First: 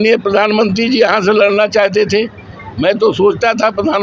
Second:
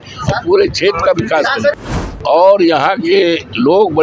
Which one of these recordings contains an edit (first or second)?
second